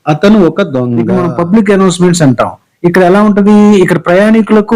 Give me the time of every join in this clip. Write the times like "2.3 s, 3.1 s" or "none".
1.0 s